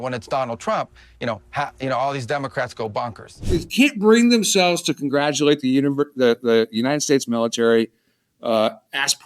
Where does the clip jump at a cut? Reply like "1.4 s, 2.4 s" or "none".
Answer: 3.4 s